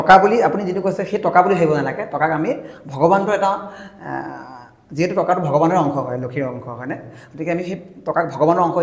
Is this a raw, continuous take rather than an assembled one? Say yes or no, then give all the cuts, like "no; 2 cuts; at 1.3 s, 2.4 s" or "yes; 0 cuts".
yes; 0 cuts